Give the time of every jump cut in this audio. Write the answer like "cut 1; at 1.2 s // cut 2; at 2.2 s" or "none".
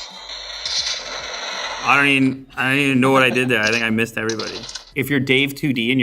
cut 1; at 4.8 s